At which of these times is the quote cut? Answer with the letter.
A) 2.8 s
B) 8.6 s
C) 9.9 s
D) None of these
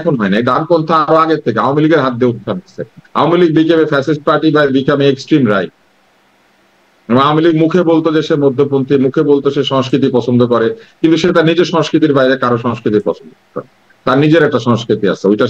D